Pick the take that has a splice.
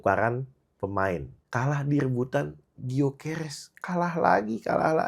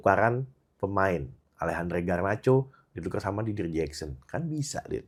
first; 1 cut; at 1.4 s

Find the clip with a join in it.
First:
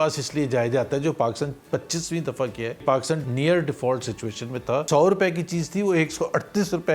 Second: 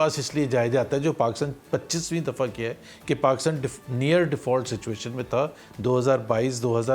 first; 2 cuts; at 3.0 s, 4.8 s

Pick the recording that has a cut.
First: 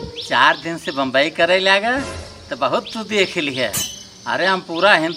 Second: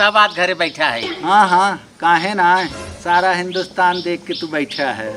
second; 1 cut; at 1.1 s

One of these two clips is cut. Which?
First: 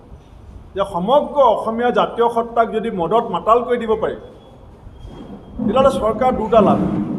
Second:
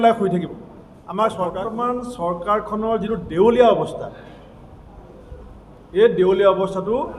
second; 1 cut; at 1.7 s

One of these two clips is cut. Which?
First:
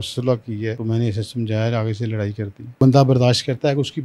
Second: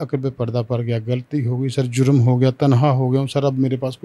first; 2 cuts; at 0.8 s, 2.8 s

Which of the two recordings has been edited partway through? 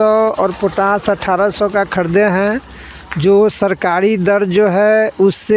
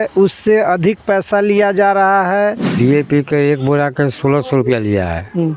second; 1 cut; at 2.7 s

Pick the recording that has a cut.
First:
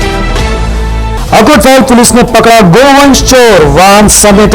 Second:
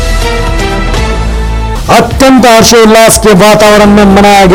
first; 1 cut; at 1.1 s

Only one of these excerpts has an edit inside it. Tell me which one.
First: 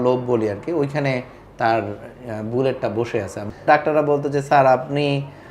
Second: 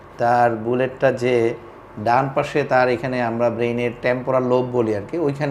first; 1 cut; at 3.6 s

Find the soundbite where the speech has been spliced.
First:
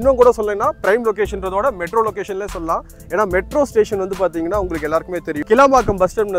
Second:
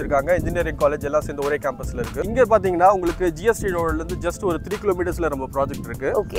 second; 1 cut; at 2.3 s

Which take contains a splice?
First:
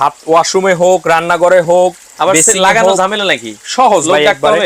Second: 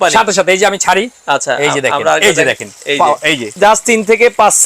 second; 1 cut; at 3.6 s

